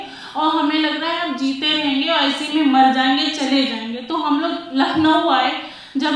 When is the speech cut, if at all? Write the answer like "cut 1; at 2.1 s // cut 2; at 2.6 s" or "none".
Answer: none